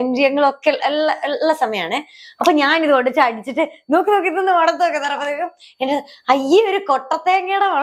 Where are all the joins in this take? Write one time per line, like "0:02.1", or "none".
none